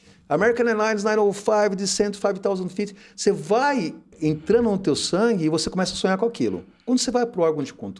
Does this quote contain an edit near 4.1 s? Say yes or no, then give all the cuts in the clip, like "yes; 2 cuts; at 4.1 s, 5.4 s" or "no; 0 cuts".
yes; 1 cut; at 4.1 s